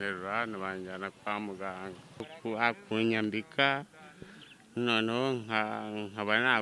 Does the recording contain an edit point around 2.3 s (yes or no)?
yes